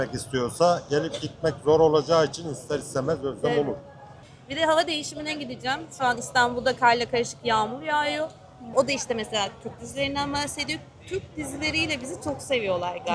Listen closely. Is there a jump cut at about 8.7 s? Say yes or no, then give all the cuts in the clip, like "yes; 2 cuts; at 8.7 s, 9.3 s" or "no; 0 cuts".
yes; 2 cuts; at 4.2 s, 8.7 s